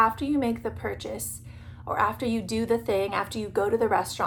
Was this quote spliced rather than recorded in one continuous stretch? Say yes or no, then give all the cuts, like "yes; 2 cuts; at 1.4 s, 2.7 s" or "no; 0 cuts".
no; 0 cuts